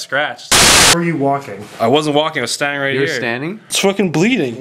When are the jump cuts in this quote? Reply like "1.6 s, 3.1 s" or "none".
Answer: 0.8 s, 3.6 s

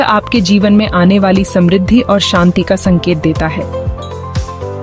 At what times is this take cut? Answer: 3.5 s

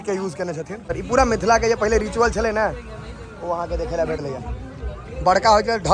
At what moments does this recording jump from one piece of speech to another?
1.0 s, 4.2 s

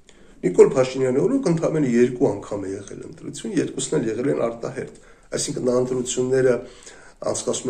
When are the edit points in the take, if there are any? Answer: none

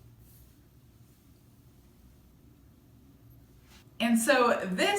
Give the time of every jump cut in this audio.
0.7 s, 3.8 s

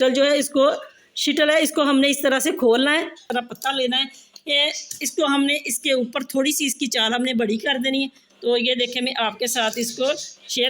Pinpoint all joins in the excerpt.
3.2 s

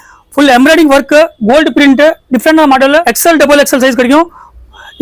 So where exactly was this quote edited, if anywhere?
3.1 s

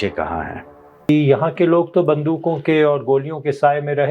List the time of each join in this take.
1.1 s

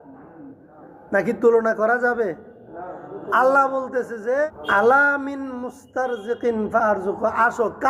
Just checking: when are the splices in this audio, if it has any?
4.6 s

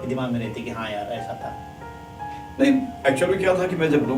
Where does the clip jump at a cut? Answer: none

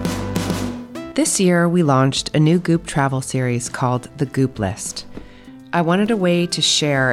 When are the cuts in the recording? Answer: 1.1 s

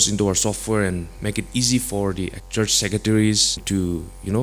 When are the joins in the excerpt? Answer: 2.4 s, 3.6 s

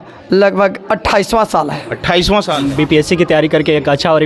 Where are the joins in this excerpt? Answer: 2.7 s

